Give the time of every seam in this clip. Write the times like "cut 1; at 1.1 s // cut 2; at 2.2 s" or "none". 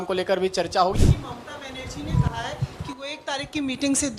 cut 1; at 1.0 s